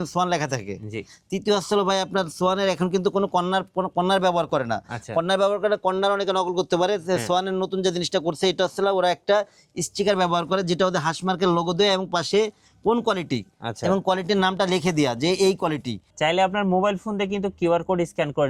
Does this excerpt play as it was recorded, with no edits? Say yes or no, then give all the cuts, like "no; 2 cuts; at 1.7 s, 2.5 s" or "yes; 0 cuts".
no; 1 cut; at 16.1 s